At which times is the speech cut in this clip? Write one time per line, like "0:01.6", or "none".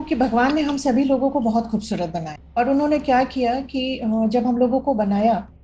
none